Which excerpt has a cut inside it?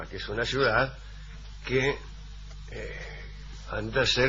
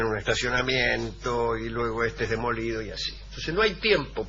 second; 1 cut; at 2.7 s

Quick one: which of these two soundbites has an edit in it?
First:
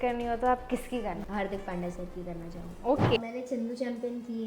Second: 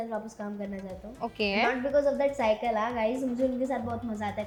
first; 2 cuts; at 1.2 s, 3.2 s

